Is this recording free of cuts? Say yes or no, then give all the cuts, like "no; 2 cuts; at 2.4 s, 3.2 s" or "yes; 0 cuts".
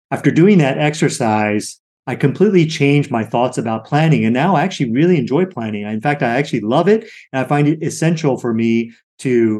yes; 0 cuts